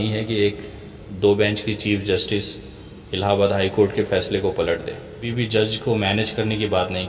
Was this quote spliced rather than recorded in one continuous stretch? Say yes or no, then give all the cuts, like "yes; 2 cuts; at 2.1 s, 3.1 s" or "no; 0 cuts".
yes; 1 cut; at 5.3 s